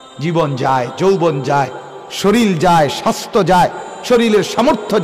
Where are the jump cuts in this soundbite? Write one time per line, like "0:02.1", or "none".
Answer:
none